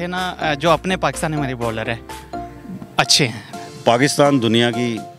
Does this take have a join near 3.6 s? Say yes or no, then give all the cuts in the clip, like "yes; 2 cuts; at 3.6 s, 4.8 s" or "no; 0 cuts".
yes; 1 cut; at 3.6 s